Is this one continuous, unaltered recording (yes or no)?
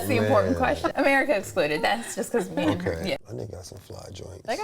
no